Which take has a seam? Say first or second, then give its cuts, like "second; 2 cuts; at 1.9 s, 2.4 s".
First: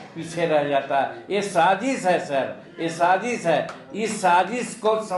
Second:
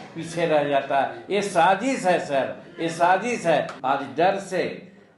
second; 1 cut; at 3.7 s